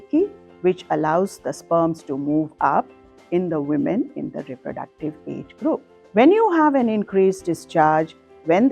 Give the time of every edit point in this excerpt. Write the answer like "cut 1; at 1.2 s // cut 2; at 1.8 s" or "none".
cut 1; at 6.0 s